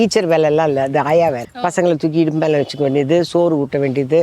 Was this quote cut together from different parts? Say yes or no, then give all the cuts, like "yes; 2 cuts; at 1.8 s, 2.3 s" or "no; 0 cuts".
yes; 1 cut; at 1.5 s